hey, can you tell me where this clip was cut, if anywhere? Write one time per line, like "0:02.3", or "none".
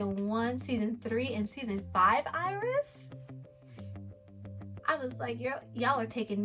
none